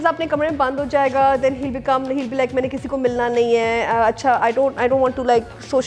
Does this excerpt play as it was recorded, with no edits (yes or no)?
yes